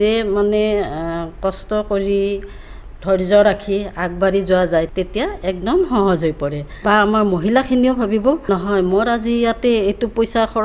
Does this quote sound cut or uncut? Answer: cut